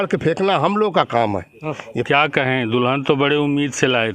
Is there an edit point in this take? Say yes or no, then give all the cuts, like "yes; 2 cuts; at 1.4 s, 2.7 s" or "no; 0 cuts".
yes; 1 cut; at 1.9 s